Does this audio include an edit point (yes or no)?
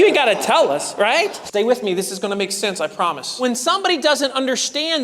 yes